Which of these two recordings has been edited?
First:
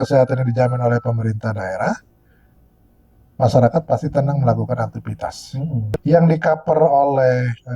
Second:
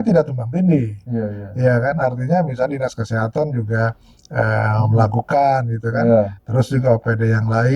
first; 1 cut; at 5.9 s

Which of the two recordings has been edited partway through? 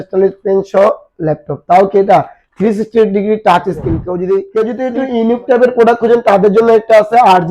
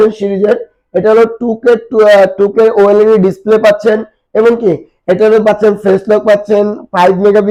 first; 1 cut; at 4.5 s

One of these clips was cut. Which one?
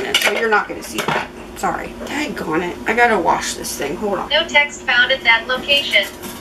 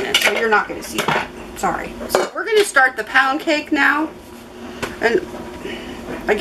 first; 2 cuts; at 2.1 s, 4.3 s

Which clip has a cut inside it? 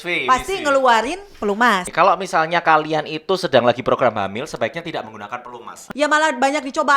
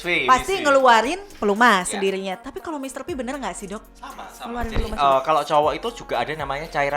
first; 2 cuts; at 1.9 s, 5.8 s

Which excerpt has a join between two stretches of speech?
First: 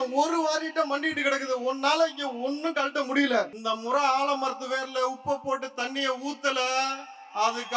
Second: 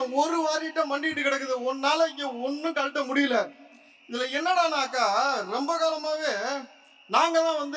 first; 1 cut; at 3.6 s

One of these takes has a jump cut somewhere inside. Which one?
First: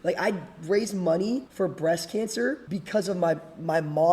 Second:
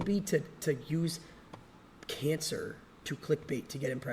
first; 2 cuts; at 1.5 s, 2.6 s

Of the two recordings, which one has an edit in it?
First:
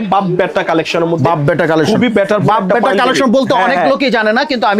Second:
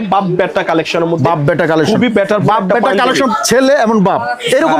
second; 1 cut; at 3.3 s

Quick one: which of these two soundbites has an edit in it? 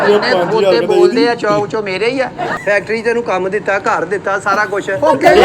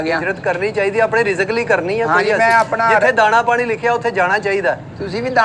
first; 1 cut; at 2.5 s

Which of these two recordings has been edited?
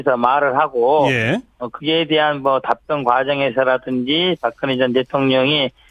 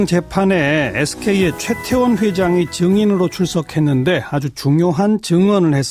first; 1 cut; at 1.3 s

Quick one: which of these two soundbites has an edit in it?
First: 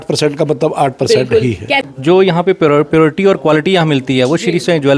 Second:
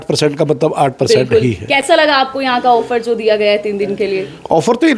first; 1 cut; at 1.7 s

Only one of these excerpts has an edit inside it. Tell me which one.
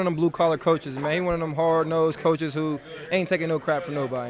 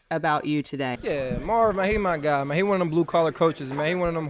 second; 1 cut; at 1.0 s

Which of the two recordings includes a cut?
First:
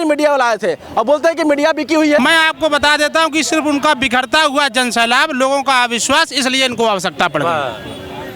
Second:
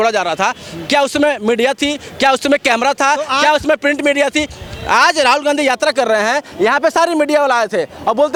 first; 1 cut; at 2.2 s

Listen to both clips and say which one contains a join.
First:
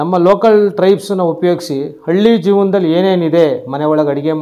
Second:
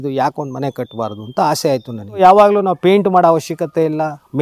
second; 1 cut; at 2.2 s

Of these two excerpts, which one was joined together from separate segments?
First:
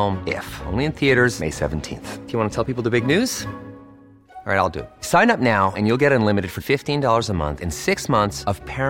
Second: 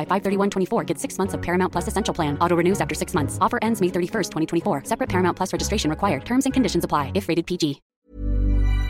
second; 1 cut; at 7.9 s

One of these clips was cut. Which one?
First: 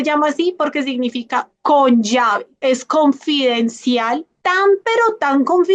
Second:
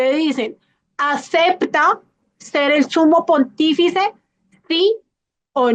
first; 2 cuts; at 2.6 s, 4.3 s

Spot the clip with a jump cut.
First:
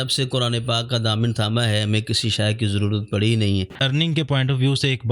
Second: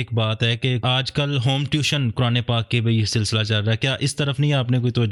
first; 1 cut; at 3.7 s

